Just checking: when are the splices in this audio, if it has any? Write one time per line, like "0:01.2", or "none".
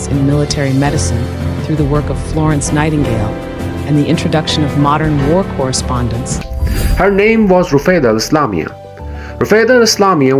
0:06.4